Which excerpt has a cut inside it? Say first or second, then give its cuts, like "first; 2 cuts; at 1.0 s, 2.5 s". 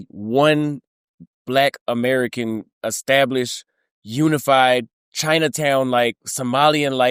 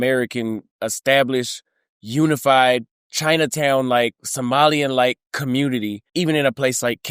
second; 1 cut; at 6.0 s